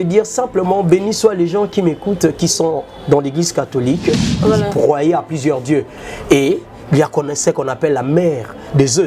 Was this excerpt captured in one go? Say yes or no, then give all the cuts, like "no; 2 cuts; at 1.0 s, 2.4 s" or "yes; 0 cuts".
no; 1 cut; at 4.2 s